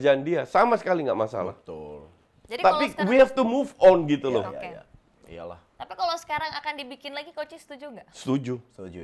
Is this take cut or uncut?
uncut